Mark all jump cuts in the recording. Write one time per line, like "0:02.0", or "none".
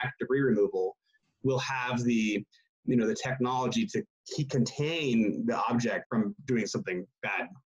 0:06.0